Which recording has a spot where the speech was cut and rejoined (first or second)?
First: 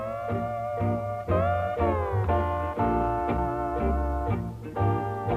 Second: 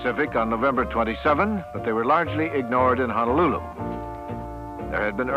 first